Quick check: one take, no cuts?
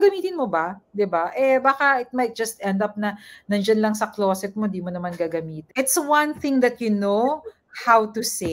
no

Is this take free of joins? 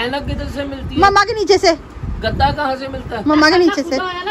no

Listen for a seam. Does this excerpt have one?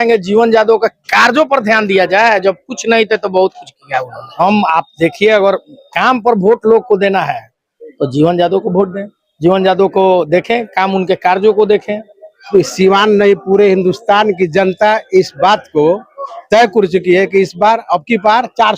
yes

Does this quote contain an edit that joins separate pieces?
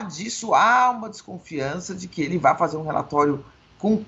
no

